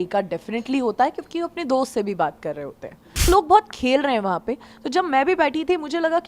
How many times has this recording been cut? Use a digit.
1